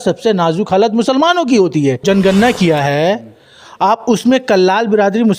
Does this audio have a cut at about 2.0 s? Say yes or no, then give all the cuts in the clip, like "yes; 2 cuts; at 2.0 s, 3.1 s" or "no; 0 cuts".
yes; 1 cut; at 2.0 s